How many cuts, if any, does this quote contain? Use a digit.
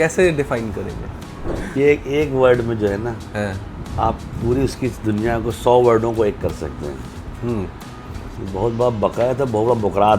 1